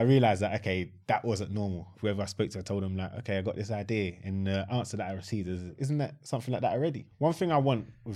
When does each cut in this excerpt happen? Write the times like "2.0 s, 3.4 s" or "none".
1.9 s, 5.8 s, 7.1 s

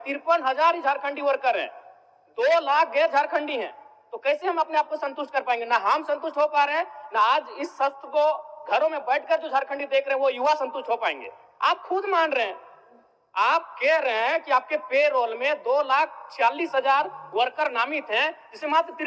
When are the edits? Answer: none

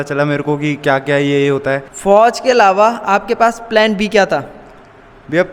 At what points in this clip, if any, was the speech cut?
1.9 s

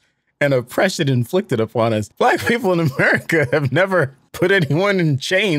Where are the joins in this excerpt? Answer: 2.1 s, 4.2 s

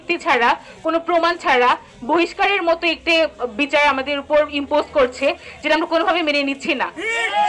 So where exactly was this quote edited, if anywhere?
none

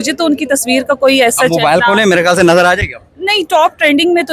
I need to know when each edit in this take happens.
none

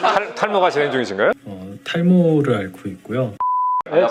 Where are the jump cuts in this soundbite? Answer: none

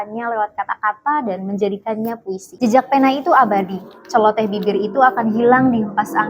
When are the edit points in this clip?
2.5 s

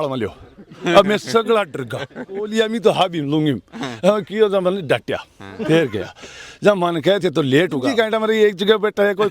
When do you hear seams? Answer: 2.5 s, 7.8 s

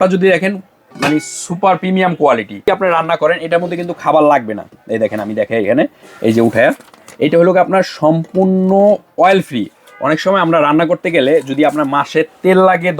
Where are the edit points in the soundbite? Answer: 2.6 s

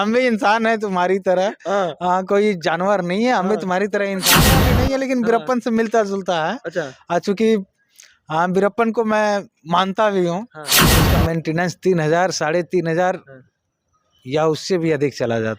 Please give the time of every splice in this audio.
4.6 s, 11.1 s

